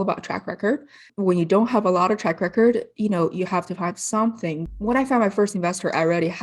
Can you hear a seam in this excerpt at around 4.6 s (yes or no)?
yes